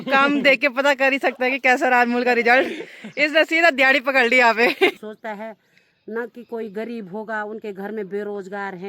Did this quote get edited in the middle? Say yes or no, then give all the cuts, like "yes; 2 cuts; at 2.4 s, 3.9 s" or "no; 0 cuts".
yes; 1 cut; at 4.9 s